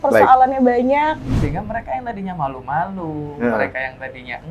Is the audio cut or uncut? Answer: cut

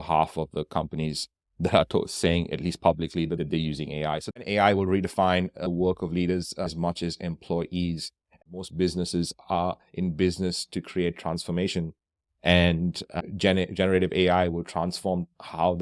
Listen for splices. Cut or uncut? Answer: cut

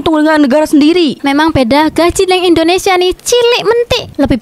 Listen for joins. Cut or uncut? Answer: cut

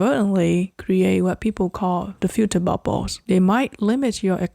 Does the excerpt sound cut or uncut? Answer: cut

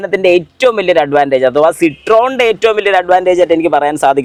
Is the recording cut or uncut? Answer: uncut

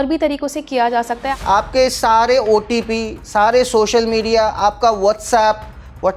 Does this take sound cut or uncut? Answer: cut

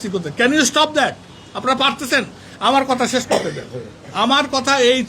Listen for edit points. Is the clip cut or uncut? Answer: uncut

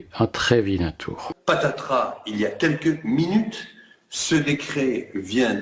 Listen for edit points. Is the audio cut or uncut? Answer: cut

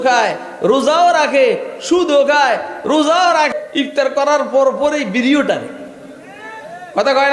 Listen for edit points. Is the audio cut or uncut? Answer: cut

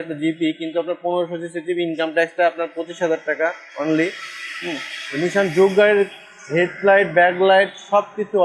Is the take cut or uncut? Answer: uncut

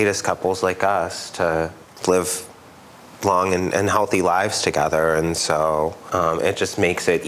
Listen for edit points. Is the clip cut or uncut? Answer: cut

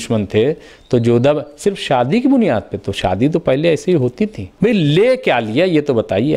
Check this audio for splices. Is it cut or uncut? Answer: cut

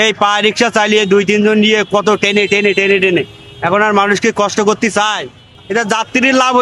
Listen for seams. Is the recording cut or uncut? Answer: cut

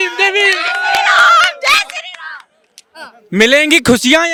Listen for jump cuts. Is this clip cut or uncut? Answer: uncut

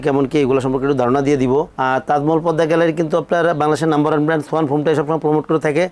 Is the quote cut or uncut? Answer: uncut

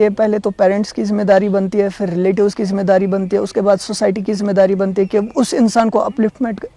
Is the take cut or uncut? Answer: uncut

